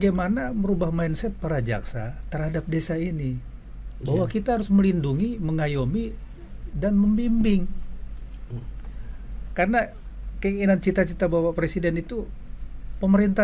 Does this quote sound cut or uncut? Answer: uncut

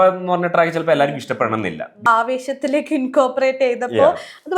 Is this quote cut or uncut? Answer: cut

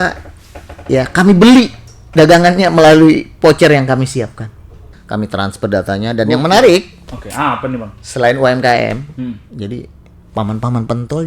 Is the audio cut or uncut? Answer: cut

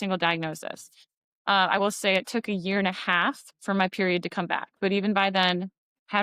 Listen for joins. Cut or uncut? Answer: uncut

